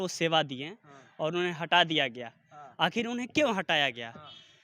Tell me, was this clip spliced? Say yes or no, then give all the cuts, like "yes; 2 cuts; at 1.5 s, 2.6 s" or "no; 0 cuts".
no; 0 cuts